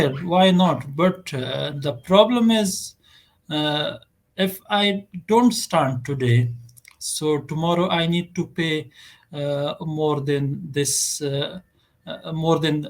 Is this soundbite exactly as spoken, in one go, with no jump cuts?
yes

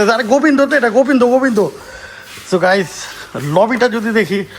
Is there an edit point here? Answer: yes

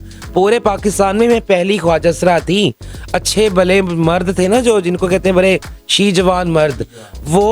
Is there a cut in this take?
no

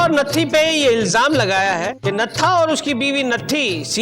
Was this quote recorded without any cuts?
no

